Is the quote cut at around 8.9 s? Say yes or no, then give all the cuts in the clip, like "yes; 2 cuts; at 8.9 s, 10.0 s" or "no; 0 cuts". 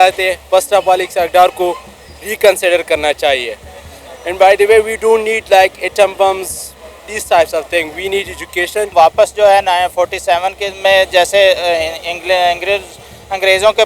yes; 1 cut; at 8.9 s